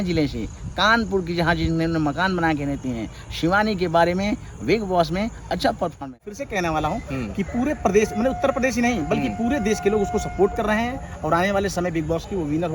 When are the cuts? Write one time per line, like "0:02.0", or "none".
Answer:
0:06.4